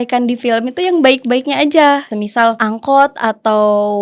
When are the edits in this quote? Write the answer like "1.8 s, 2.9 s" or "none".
2.1 s